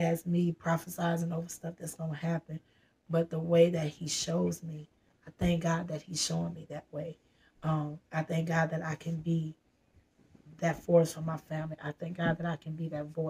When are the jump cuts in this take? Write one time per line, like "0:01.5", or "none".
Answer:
none